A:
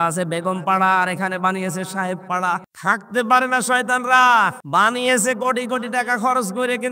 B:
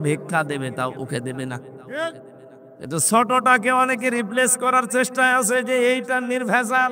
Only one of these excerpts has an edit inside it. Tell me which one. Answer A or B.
A